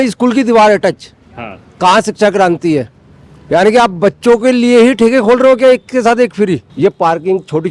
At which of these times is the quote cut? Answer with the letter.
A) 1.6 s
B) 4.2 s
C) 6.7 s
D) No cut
C